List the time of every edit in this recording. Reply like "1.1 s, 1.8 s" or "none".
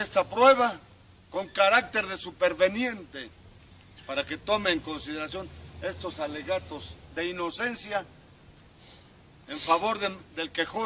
5.5 s